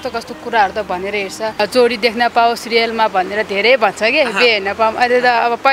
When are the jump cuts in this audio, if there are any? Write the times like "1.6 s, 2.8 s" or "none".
1.5 s